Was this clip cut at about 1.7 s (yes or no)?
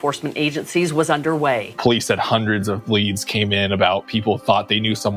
yes